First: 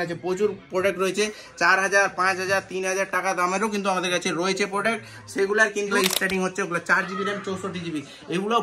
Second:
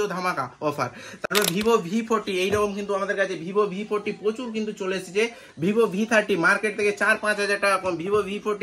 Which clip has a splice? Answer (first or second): first